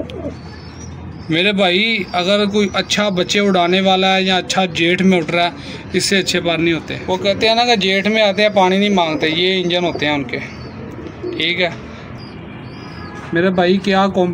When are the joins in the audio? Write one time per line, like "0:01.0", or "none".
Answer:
0:06.9
0:12.1